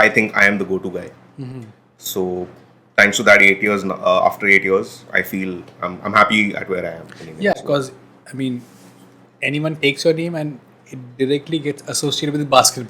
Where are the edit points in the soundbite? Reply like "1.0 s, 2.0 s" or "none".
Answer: none